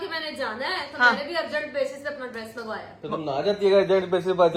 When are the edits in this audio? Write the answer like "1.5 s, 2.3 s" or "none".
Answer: none